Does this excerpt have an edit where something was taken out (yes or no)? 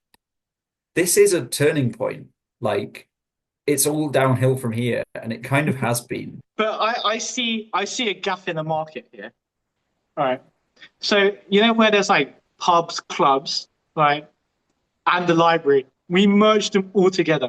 yes